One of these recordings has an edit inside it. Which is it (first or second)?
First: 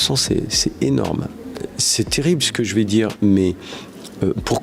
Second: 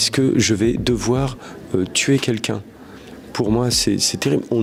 first